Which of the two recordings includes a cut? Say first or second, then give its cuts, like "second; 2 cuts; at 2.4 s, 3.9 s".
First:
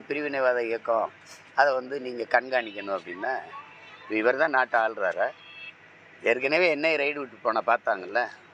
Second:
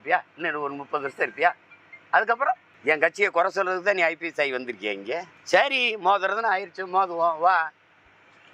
second; 2 cuts; at 2.7 s, 5.3 s